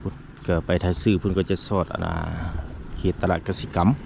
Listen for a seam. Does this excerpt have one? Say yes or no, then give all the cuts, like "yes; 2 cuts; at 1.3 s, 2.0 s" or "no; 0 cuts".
no; 0 cuts